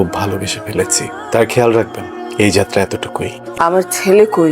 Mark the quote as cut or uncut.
cut